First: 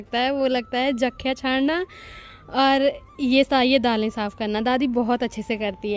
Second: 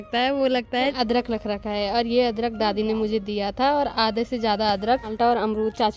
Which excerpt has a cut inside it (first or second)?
second